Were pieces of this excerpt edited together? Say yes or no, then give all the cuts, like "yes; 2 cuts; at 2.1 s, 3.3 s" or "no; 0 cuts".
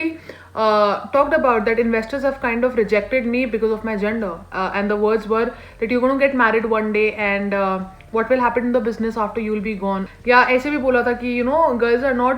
yes; 1 cut; at 10.1 s